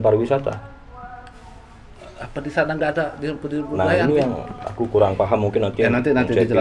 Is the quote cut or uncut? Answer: uncut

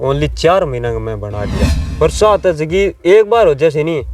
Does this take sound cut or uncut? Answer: cut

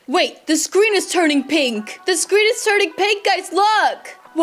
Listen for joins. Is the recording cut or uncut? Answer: uncut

